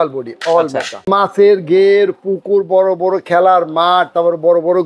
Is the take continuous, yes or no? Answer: no